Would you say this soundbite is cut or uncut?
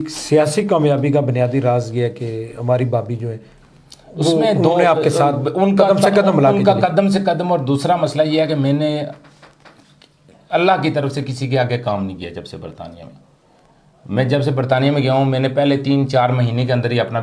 uncut